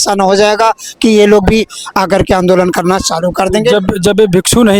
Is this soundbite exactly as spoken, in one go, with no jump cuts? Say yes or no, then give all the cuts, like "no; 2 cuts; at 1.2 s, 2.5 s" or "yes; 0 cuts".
yes; 0 cuts